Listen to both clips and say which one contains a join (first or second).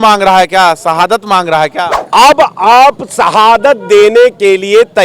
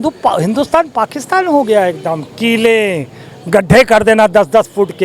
first